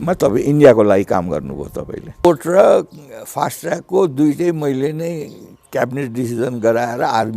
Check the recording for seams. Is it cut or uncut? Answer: cut